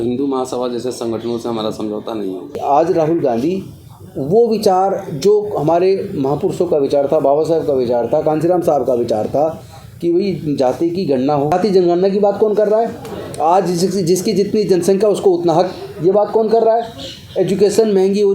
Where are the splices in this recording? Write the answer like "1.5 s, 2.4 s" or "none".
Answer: 2.6 s, 11.5 s